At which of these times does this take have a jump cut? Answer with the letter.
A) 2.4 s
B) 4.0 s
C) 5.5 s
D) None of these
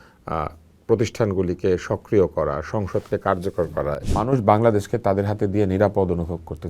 B